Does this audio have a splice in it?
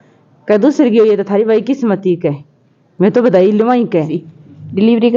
yes; 1 cut; at 4.1 s

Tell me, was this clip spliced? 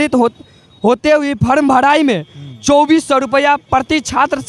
no; 0 cuts

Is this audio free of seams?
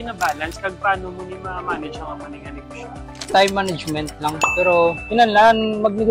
no; 1 cut; at 5.0 s

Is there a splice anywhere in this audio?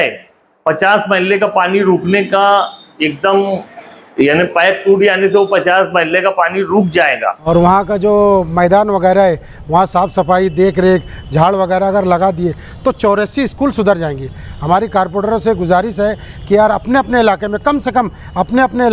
yes; 1 cut; at 7.3 s

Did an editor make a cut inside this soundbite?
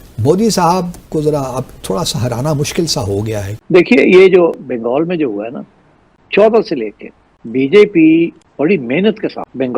yes; 2 cuts; at 3.5 s, 6.2 s

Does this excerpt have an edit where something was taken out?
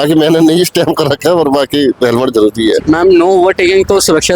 yes; 1 cut; at 2.8 s

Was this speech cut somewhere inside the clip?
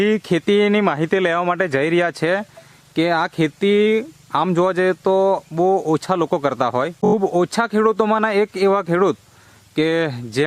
yes; 1 cut; at 7.0 s

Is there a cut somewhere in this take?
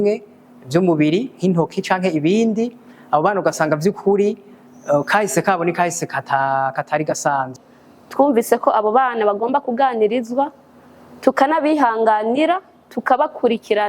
yes; 1 cut; at 7.5 s

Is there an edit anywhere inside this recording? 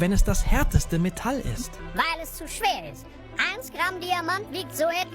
yes; 1 cut; at 1.8 s

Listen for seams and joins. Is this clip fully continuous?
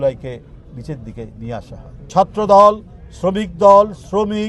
no; 1 cut; at 2.0 s

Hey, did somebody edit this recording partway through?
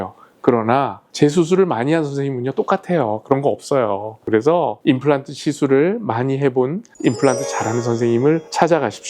yes; 1 cut; at 4.2 s

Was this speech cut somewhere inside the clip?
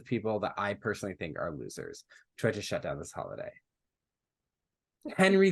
no; 0 cuts

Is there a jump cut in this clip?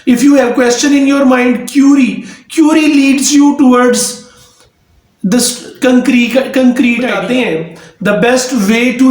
yes; 1 cut; at 7.2 s

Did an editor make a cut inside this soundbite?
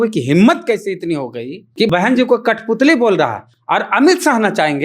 yes; 1 cut; at 1.9 s

